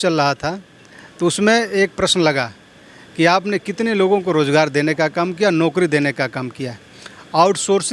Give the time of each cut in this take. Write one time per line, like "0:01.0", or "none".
none